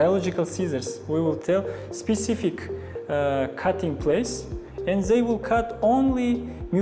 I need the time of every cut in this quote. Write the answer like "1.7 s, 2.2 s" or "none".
1.4 s